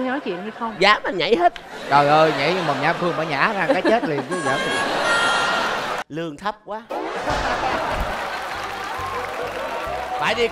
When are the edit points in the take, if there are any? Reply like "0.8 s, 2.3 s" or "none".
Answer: 6.0 s

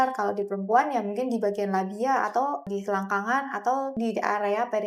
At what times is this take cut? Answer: 2.6 s, 3.9 s

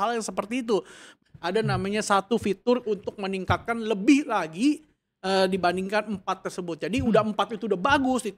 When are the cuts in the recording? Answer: 1.2 s

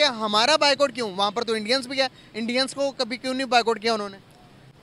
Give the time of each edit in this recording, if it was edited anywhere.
none

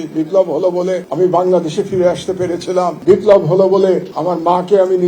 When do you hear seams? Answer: 1.1 s, 3.0 s, 4.1 s

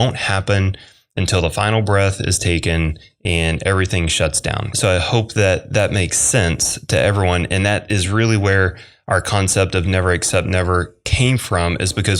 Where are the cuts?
4.7 s

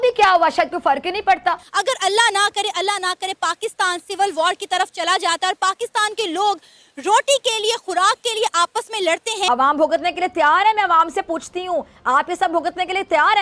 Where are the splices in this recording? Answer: 1.6 s, 9.5 s

